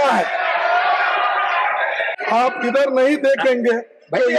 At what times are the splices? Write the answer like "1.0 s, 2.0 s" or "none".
2.1 s

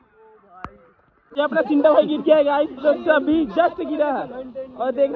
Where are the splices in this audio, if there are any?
1.3 s

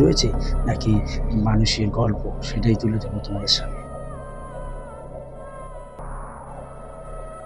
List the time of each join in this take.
none

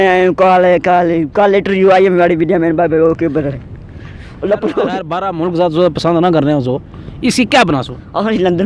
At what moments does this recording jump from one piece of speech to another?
5.2 s

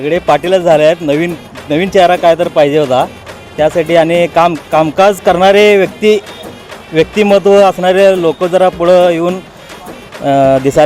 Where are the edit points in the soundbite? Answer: 3.1 s

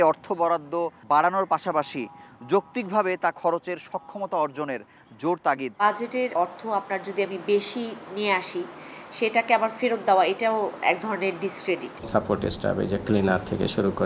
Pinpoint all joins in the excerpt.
0.9 s, 5.8 s, 11.9 s

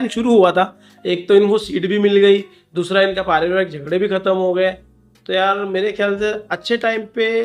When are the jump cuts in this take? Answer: none

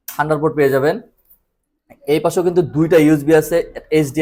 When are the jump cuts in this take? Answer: none

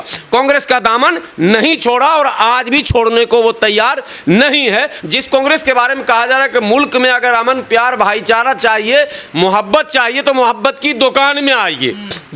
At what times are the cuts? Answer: 5.0 s

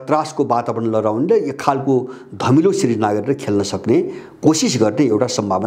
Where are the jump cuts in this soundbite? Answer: none

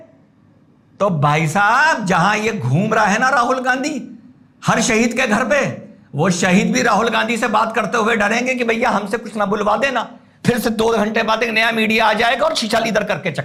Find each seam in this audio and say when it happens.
none

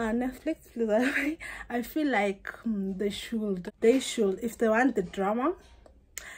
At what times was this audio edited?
3.6 s

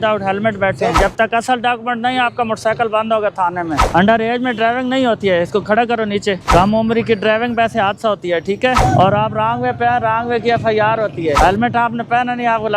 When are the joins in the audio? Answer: 1.0 s, 3.8 s, 6.4 s, 8.8 s, 11.4 s

